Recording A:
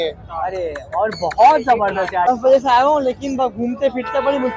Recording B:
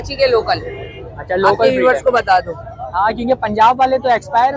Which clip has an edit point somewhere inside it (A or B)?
A